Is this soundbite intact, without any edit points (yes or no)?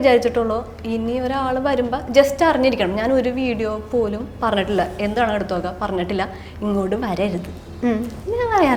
yes